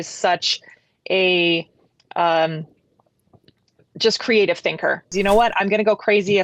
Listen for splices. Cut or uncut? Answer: cut